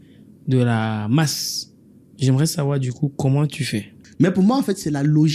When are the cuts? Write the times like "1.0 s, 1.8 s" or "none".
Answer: 4.0 s